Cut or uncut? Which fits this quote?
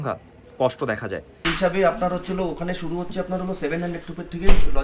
cut